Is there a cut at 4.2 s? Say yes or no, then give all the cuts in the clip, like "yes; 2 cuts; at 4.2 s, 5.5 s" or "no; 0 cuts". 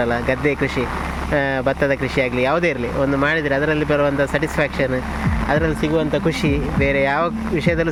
no; 0 cuts